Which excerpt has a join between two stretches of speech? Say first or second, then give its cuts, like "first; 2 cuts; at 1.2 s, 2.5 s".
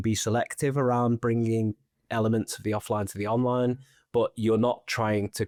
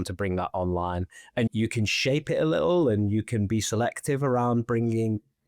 second; 1 cut; at 1.5 s